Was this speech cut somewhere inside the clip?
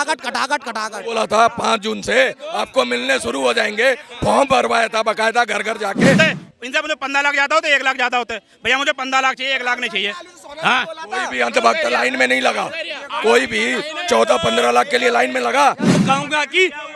yes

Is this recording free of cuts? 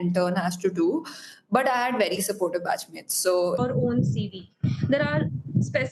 no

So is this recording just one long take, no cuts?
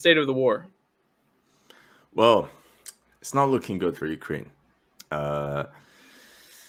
yes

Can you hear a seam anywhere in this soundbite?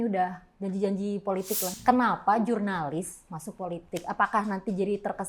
yes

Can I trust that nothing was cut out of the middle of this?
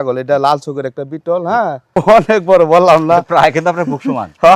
no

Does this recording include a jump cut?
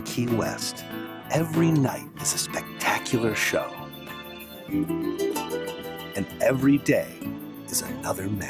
no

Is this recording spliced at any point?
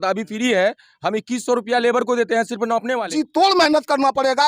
yes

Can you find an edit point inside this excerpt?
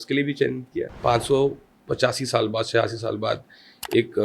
yes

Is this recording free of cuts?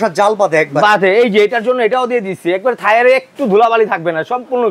yes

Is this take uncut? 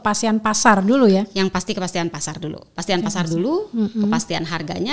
yes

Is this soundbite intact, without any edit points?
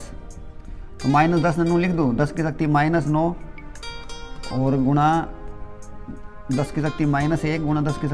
yes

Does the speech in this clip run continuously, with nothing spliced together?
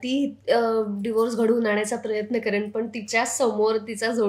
yes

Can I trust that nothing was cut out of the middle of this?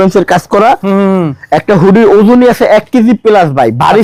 yes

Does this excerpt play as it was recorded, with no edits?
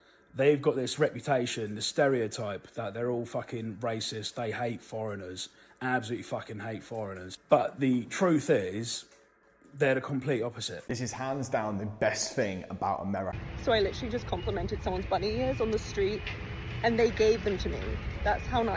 no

